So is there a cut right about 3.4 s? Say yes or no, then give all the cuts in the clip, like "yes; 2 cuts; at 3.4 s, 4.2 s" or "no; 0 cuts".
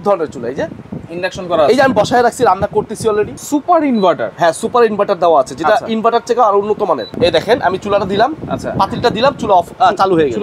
yes; 2 cuts; at 3.4 s, 7.1 s